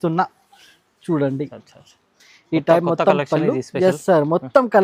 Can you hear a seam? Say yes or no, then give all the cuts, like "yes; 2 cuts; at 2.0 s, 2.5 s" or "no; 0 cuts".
no; 0 cuts